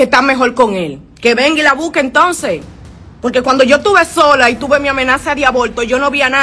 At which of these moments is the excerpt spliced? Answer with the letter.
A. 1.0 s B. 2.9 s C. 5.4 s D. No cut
A